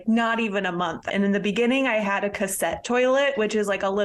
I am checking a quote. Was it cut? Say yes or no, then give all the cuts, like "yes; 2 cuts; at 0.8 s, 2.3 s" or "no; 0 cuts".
yes; 1 cut; at 1.0 s